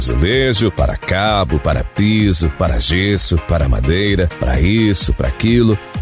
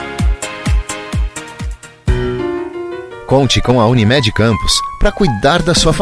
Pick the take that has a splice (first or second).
second